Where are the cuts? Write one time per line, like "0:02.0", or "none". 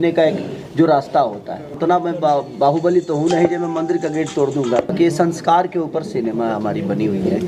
0:01.7
0:04.9